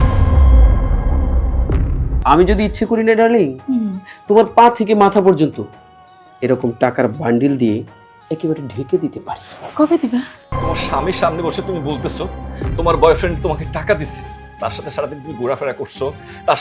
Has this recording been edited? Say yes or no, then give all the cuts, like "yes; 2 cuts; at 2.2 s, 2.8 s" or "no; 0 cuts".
yes; 2 cuts; at 2.1 s, 10.5 s